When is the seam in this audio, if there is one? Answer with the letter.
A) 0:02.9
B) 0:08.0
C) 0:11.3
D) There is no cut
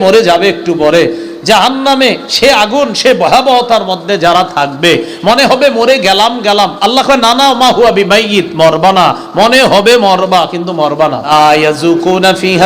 C